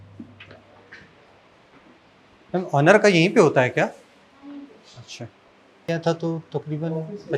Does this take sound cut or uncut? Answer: cut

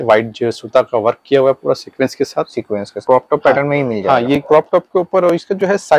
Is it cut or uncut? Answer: cut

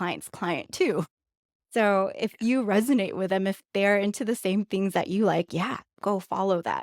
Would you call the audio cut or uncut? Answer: cut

